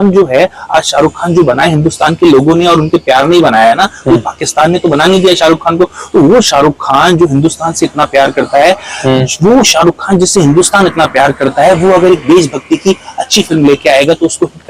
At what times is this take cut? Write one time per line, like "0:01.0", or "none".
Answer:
none